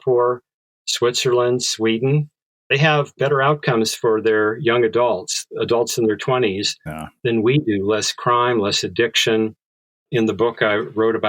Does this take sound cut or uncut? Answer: cut